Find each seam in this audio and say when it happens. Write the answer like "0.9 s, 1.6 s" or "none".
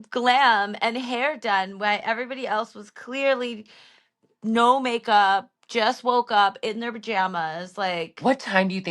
none